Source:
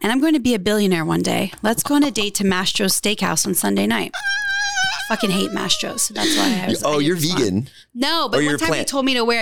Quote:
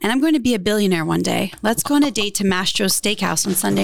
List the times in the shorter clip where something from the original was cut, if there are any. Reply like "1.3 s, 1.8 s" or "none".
none